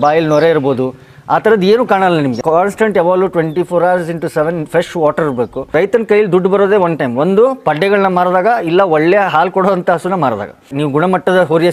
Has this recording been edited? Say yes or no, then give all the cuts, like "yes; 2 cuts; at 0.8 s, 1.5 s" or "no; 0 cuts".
yes; 3 cuts; at 2.4 s, 5.7 s, 10.7 s